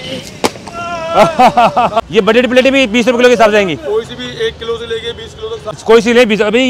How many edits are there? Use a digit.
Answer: 2